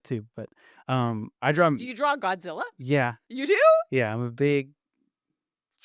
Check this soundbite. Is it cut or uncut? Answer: uncut